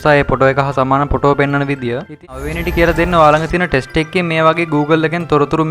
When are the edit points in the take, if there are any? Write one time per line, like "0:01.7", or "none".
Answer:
0:02.4